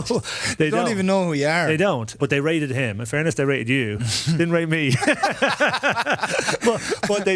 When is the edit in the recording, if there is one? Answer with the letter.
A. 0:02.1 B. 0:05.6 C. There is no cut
A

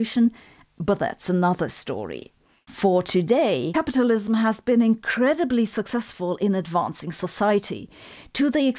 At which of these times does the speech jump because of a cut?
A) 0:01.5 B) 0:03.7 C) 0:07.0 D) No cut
B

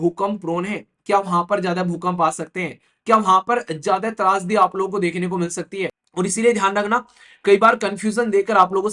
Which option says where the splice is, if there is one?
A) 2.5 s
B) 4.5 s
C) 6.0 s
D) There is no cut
C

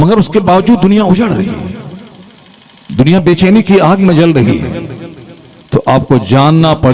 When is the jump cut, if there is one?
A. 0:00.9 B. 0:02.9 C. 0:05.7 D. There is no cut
D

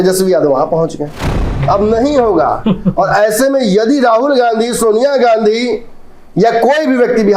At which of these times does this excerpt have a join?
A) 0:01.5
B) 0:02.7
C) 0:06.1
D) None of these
A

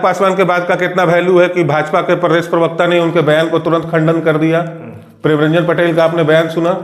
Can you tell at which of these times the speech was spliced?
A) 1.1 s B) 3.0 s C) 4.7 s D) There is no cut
D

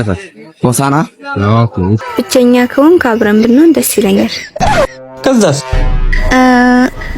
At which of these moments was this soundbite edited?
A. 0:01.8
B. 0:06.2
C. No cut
A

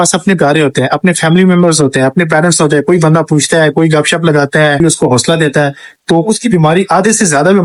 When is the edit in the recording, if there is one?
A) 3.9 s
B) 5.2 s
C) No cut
C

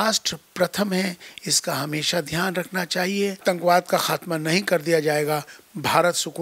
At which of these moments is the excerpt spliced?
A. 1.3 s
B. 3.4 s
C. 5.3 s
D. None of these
B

